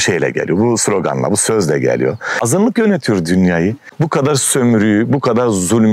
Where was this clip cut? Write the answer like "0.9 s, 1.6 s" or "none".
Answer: 2.4 s